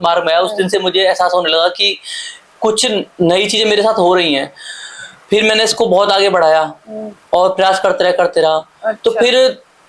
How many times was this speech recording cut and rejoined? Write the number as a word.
zero